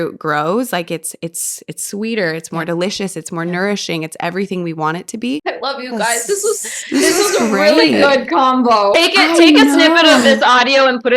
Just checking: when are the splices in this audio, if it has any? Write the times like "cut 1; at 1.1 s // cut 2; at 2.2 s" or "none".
cut 1; at 5.4 s // cut 2; at 8.9 s